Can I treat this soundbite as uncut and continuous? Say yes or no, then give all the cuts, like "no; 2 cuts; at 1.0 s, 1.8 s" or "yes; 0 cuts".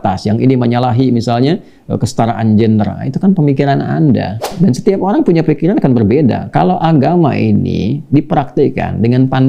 no; 1 cut; at 4.5 s